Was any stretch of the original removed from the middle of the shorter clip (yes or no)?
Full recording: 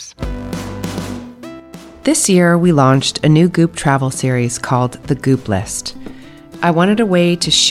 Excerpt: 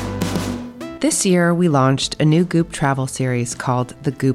yes